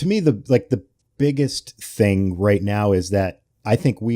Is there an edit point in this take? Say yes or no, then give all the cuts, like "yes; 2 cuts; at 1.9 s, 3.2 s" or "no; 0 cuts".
yes; 1 cut; at 1.0 s